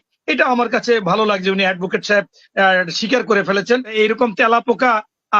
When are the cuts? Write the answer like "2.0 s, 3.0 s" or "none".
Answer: 3.9 s